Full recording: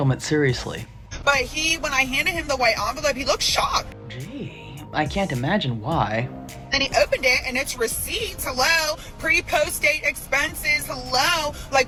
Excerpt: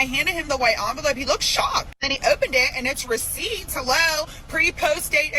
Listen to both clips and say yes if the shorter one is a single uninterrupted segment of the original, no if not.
no